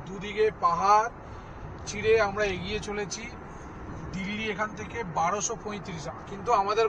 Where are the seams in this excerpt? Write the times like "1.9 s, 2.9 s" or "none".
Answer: none